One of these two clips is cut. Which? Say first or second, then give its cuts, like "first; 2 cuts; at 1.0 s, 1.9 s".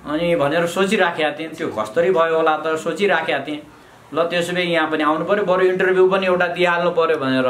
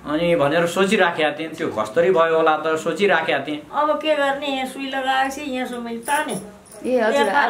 second; 1 cut; at 3.6 s